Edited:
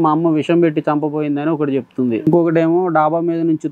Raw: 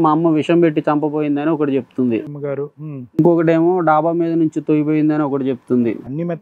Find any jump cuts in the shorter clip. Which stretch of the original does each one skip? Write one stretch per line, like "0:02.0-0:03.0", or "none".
0:02.2-0:03.1

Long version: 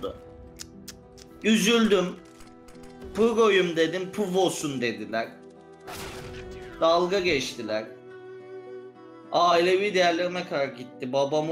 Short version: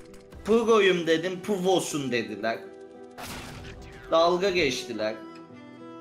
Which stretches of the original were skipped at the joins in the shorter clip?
none

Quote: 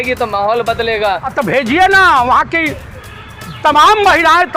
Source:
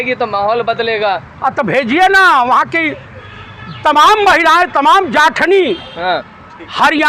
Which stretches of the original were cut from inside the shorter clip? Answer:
0:01.3-0:01.5

